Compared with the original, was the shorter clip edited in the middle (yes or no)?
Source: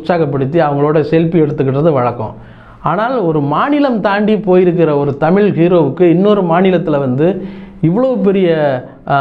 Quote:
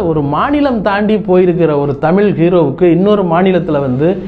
no